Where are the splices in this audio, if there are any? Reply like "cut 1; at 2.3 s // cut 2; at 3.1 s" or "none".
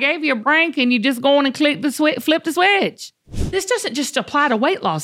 cut 1; at 3.3 s